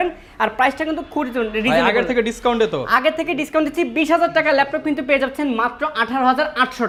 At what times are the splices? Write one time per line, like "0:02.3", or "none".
none